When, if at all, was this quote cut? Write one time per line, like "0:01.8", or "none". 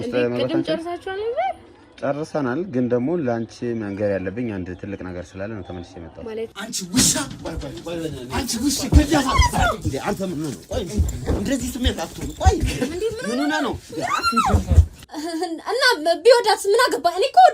0:06.5
0:15.0

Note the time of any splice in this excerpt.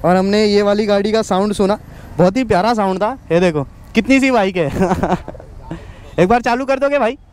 none

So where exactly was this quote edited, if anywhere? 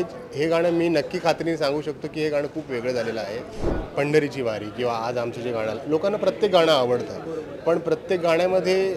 0:03.7

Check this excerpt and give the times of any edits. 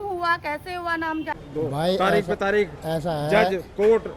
0:01.3

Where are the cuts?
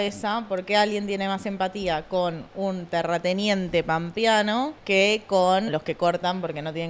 0:04.8
0:05.7

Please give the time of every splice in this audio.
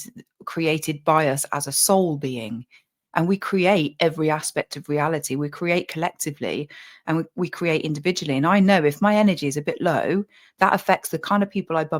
none

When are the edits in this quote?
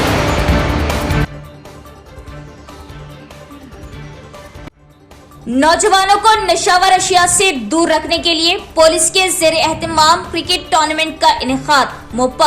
none

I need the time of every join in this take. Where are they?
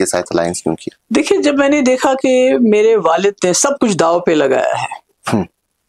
none

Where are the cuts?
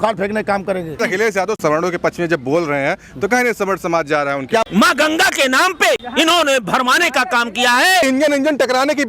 0:01.1
0:04.6
0:06.1
0:08.0

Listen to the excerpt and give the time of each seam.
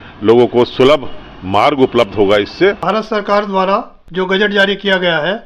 0:02.8
0:04.0

